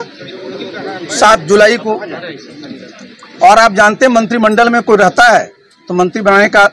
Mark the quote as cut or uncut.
uncut